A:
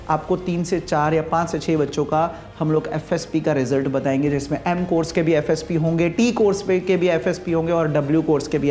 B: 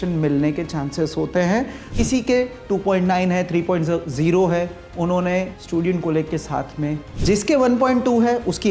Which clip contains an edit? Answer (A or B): B